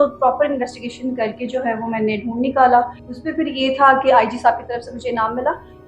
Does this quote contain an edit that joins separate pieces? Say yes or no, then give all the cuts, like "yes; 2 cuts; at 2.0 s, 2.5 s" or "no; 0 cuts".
yes; 1 cut; at 3.0 s